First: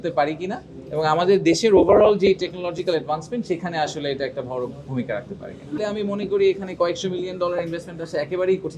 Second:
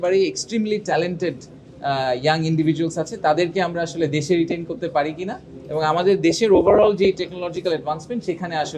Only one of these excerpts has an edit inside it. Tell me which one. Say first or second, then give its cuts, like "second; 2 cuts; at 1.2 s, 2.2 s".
first; 1 cut; at 5.8 s